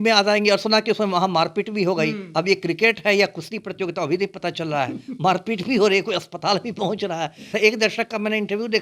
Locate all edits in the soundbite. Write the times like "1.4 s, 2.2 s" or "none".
7.5 s